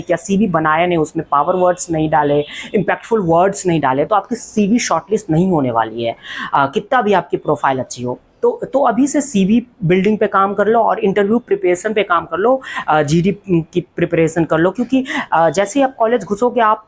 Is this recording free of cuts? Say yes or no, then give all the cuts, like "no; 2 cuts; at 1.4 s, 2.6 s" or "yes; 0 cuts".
yes; 0 cuts